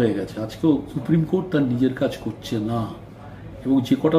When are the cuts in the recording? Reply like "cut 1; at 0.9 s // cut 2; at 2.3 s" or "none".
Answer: cut 1; at 0.9 s